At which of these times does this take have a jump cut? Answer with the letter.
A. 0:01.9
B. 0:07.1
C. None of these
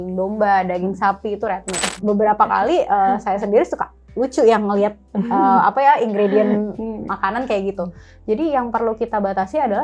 A